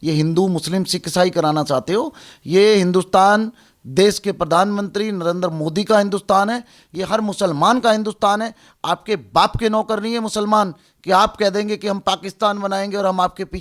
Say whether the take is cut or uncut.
cut